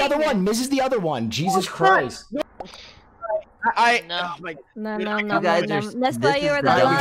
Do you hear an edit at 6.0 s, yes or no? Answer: no